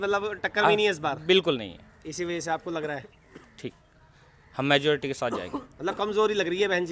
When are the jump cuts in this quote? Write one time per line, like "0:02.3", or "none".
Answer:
none